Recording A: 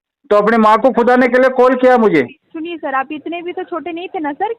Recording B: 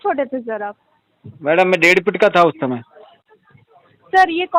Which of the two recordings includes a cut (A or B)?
A